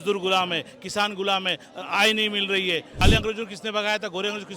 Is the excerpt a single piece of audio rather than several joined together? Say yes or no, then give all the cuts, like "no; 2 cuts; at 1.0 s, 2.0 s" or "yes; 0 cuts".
no; 1 cut; at 3.0 s